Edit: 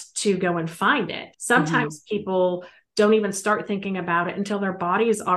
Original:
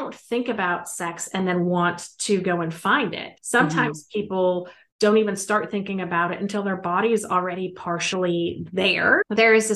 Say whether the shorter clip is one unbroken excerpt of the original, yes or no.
yes